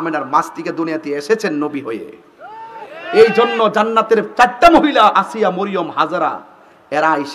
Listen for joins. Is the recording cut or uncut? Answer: uncut